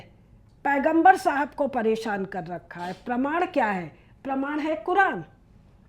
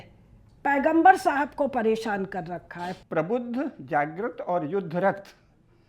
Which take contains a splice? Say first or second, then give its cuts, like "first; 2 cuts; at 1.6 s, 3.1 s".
second; 1 cut; at 3.0 s